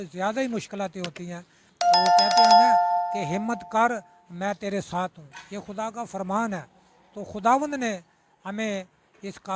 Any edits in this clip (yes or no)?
yes